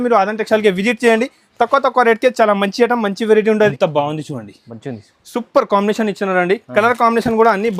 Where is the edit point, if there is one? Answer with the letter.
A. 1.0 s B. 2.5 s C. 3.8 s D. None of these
C